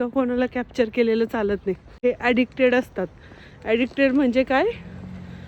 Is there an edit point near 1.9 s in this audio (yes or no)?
yes